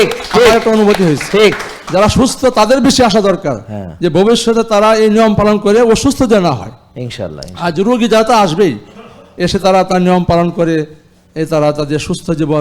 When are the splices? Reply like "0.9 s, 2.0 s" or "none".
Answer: none